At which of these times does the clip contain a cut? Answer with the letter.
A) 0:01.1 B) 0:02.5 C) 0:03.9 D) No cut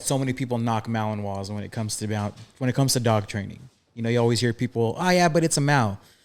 D